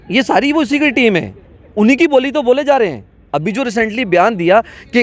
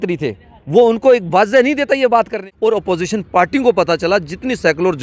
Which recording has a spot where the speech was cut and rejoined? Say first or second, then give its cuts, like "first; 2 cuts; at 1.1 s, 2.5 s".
second; 1 cut; at 2.4 s